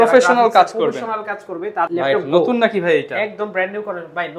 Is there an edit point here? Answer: yes; 1 cut; at 1.9 s

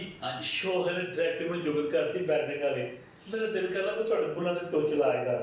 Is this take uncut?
yes; 0 cuts

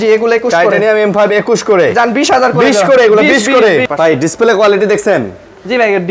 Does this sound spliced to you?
yes; 1 cut; at 3.9 s

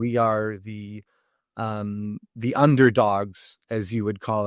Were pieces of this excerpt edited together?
no; 0 cuts

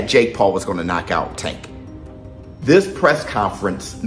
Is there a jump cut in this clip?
no; 0 cuts

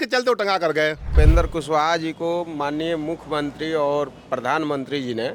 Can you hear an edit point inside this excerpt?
yes; 1 cut; at 1.0 s

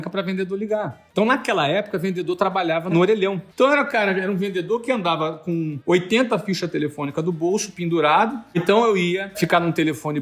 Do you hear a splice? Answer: yes; 4 cuts; at 3.4 s, 5.8 s, 8.6 s, 9.3 s

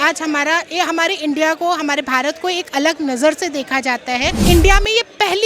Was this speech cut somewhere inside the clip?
yes; 1 cut; at 4.4 s

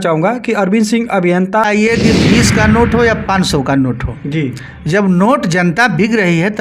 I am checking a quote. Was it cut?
yes; 1 cut; at 1.7 s

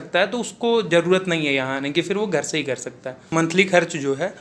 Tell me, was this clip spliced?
yes; 1 cut; at 3.3 s

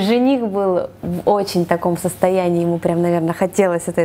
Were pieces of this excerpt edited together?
no; 0 cuts

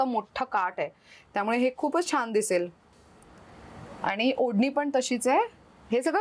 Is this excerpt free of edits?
yes; 0 cuts

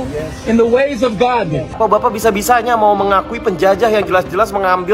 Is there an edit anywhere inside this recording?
yes; 1 cut; at 1.8 s

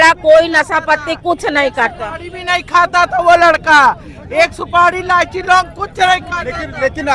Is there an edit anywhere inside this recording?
no; 0 cuts

